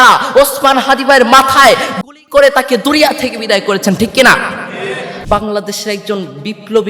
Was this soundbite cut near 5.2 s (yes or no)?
yes